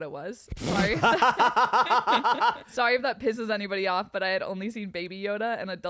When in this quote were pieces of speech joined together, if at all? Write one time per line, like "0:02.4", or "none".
0:02.6